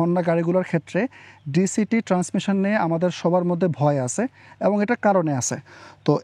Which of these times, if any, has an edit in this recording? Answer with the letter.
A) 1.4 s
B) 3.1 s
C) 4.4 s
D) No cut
D